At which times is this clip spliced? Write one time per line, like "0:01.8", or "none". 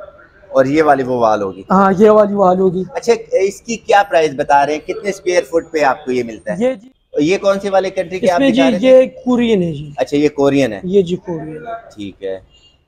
0:06.8